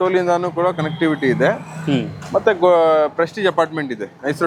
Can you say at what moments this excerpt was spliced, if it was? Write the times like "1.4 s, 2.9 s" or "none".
none